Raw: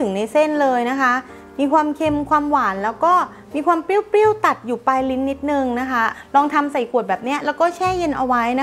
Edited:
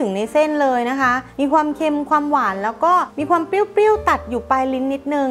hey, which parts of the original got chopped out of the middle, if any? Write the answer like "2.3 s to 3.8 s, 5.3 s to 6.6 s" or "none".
1.2 s to 1.4 s, 3.3 s to 3.5 s